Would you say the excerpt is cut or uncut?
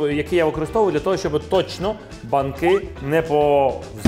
uncut